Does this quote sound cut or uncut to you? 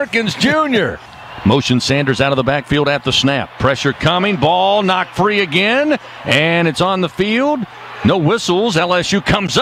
cut